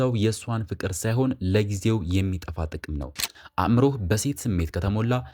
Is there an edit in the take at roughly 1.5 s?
no; 1 cut; at 3.3 s

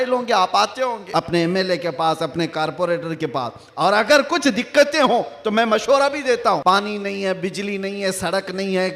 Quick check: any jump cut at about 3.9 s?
no; 2 cuts; at 1.0 s, 6.6 s

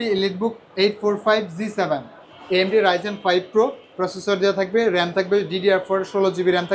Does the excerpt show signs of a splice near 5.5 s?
no; 0 cuts

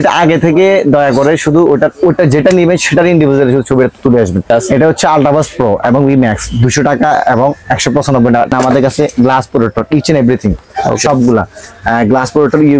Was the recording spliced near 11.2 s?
no; 2 cuts; at 4.6 s, 8.5 s

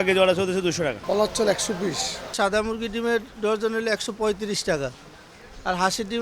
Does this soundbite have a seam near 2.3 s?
yes; 2 cuts; at 1.0 s, 2.3 s

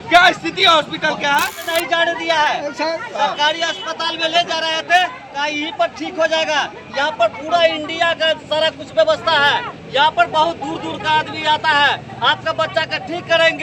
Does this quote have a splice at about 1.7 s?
yes; 1 cut; at 1.7 s

